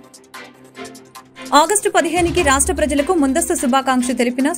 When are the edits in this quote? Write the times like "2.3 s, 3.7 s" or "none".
1.5 s